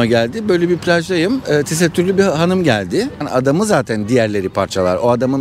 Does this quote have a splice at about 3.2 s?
yes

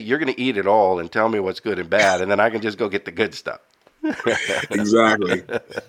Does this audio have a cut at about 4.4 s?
no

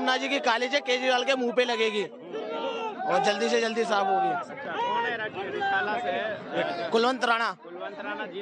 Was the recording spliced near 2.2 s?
no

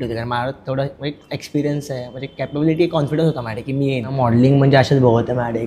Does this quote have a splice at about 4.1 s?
yes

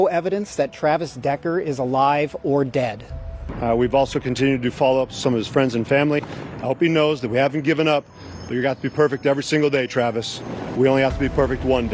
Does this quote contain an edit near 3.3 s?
yes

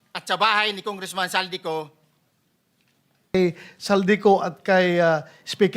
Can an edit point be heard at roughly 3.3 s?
yes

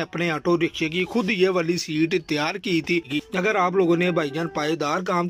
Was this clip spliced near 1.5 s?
no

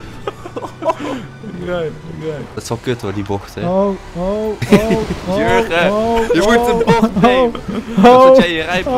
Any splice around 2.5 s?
yes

